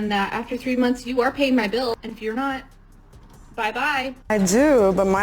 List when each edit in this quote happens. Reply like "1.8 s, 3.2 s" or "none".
4.3 s